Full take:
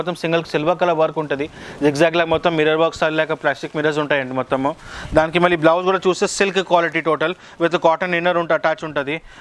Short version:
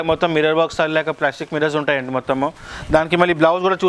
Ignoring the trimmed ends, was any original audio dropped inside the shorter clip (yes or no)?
no